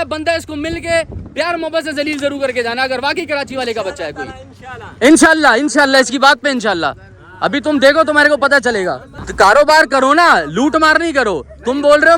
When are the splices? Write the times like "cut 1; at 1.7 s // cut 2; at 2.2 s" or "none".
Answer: cut 1; at 9.1 s

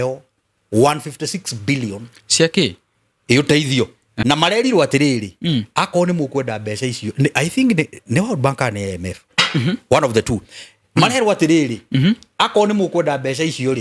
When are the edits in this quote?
cut 1; at 4.1 s

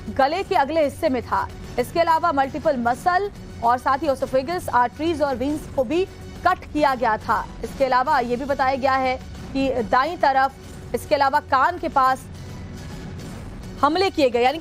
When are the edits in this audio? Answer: cut 1; at 5.6 s

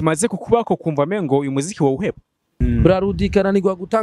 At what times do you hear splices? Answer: cut 1; at 2.5 s

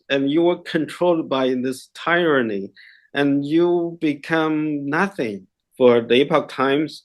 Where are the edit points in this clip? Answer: cut 1; at 5.6 s

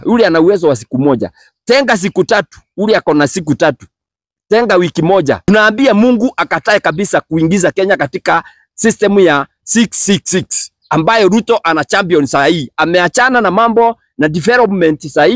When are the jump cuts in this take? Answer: cut 1; at 5.4 s

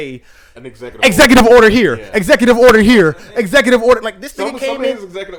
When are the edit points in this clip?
none

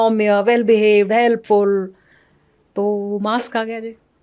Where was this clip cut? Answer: none

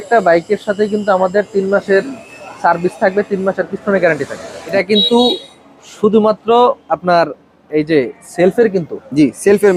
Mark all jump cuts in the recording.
none

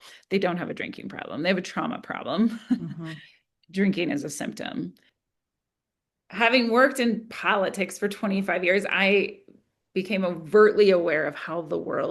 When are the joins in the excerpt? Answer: cut 1; at 5.1 s

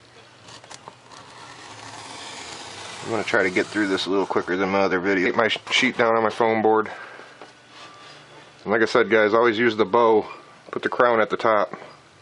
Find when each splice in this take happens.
none

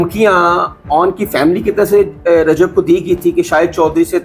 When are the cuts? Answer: none

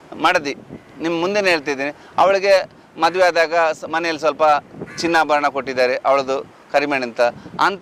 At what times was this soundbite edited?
none

